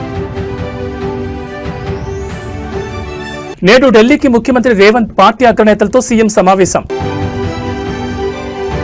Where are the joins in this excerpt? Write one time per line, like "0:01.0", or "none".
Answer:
none